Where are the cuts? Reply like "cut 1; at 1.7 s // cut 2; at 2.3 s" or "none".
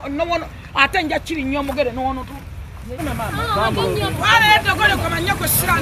cut 1; at 3.0 s